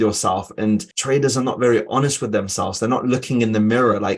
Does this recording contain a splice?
yes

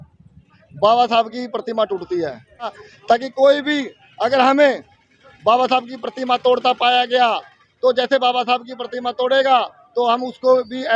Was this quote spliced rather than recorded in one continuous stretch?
yes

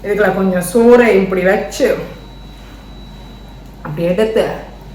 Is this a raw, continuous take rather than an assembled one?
yes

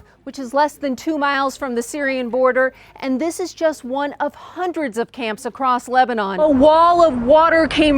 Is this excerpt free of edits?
no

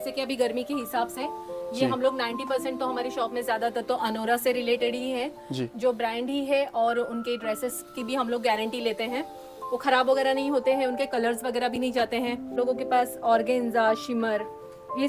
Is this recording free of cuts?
no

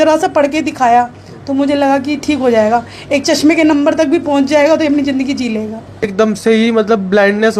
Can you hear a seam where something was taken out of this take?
yes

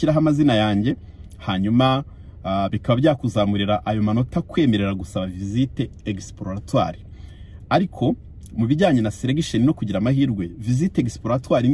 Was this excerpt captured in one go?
yes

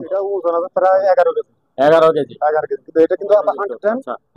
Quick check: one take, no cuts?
yes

